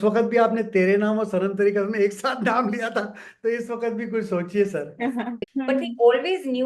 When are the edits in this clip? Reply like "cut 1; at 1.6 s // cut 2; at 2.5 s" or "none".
cut 1; at 5.4 s